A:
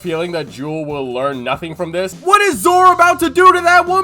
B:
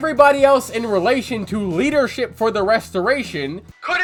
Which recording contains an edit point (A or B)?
A